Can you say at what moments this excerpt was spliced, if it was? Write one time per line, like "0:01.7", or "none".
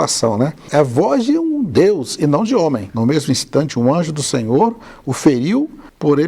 0:02.9